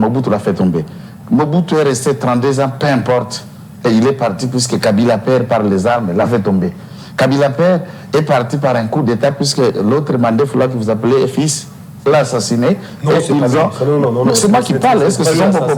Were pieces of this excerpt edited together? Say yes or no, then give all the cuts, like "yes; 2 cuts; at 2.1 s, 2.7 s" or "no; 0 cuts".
no; 0 cuts